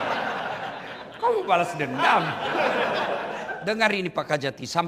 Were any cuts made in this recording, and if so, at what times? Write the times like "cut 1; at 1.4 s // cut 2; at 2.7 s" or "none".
cut 1; at 3.5 s